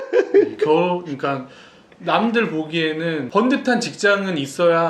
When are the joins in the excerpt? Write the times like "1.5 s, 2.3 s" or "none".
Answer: 3.3 s

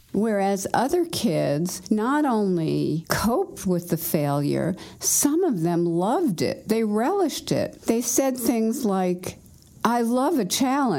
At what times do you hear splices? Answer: 1.7 s, 3.1 s, 7.7 s

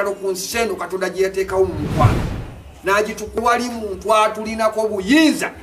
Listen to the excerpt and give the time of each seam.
3.4 s

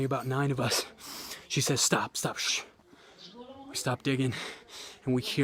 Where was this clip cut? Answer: none

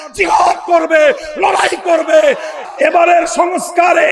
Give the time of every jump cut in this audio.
2.5 s

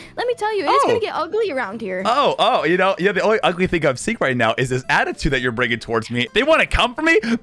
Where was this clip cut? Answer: 6.3 s

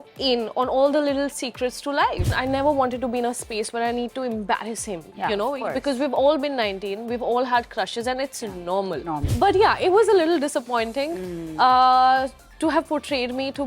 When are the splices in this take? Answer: 2.3 s, 9.3 s

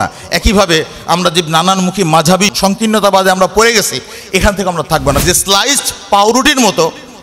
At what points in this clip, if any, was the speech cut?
2.5 s, 5.2 s

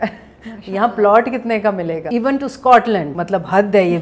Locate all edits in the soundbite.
2.0 s, 3.1 s

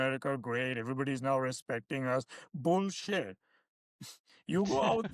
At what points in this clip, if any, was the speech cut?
none

